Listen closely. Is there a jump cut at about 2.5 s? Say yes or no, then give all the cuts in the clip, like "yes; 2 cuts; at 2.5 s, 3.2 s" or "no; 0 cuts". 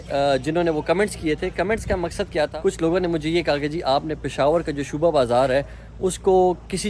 yes; 1 cut; at 2.5 s